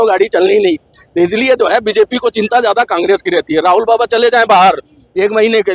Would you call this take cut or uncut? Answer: uncut